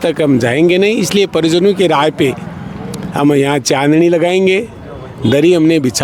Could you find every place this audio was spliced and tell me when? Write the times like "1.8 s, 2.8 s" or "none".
none